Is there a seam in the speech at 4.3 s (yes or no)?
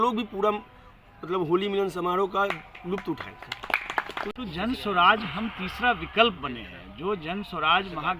yes